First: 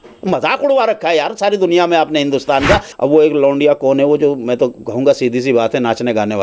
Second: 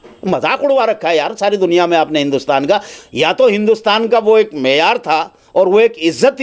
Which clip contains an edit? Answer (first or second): first